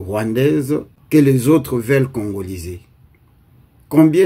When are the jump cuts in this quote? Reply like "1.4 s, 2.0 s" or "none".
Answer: 0.9 s